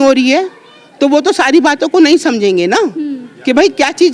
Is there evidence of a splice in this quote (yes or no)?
no